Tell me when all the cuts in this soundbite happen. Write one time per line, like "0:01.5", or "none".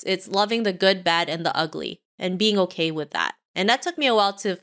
none